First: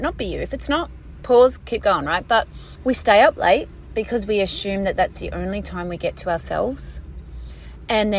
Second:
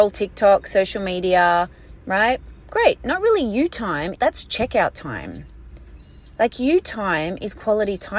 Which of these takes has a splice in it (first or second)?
first